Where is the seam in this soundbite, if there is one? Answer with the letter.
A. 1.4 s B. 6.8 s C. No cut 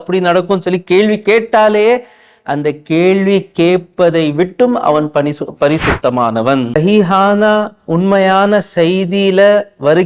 B